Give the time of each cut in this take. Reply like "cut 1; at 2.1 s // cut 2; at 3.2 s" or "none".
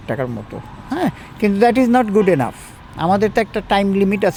none